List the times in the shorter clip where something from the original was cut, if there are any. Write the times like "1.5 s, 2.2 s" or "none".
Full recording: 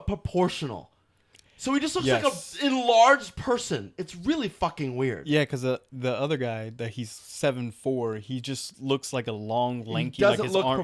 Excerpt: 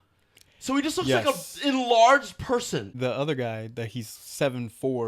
2.9 s